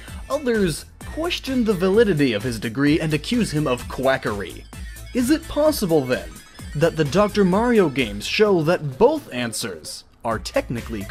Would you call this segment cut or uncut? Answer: uncut